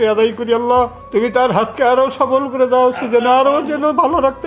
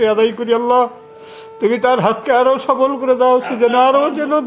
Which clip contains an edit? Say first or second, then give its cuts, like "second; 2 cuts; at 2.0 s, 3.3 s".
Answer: first; 1 cut; at 1.0 s